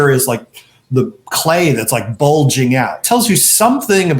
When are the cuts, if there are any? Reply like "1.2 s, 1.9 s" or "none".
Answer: 3.0 s